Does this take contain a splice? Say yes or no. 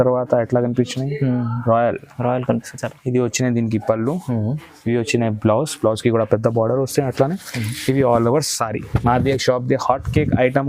no